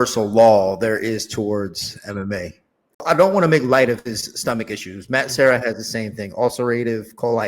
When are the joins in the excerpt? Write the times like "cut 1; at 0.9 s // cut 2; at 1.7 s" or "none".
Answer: cut 1; at 3.0 s